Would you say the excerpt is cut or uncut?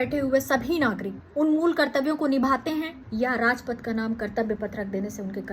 cut